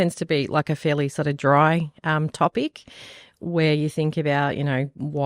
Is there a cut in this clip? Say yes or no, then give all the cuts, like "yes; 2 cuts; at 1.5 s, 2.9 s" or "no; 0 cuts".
no; 0 cuts